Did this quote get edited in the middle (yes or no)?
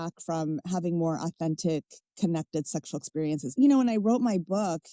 yes